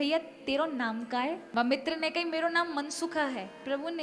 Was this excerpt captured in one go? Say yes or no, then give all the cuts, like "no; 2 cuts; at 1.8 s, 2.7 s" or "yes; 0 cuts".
no; 1 cut; at 1.4 s